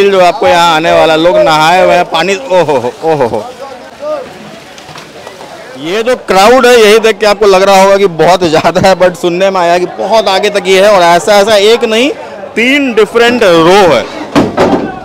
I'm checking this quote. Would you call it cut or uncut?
uncut